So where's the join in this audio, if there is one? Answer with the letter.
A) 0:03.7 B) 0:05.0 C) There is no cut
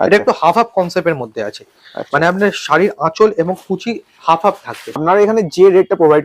B